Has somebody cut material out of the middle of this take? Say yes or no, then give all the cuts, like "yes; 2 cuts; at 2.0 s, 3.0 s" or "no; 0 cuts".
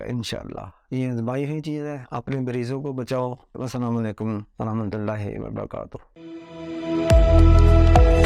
no; 0 cuts